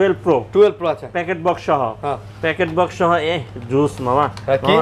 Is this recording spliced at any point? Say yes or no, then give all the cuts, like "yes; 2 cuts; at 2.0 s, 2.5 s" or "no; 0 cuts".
no; 0 cuts